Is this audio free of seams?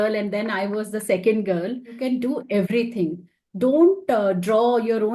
no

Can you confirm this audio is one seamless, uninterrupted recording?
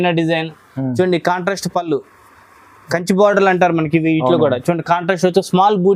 yes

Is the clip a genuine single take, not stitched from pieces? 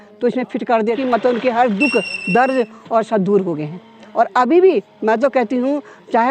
no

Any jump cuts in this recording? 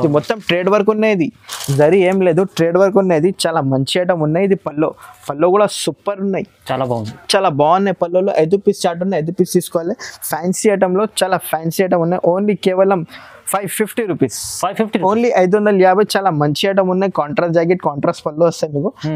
no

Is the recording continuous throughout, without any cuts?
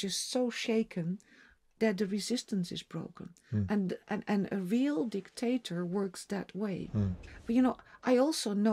no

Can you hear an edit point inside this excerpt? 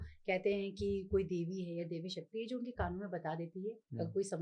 no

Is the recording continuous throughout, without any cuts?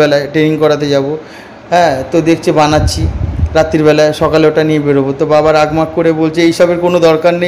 yes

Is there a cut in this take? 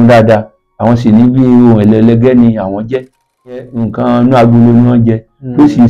yes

